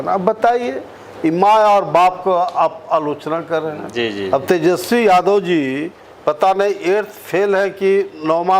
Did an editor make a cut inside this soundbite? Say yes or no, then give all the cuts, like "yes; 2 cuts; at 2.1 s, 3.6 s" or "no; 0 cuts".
no; 0 cuts